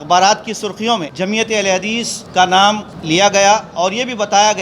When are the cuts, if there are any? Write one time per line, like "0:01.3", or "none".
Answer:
0:01.1
0:02.2
0:02.9